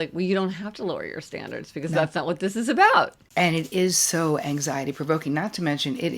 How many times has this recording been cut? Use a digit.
1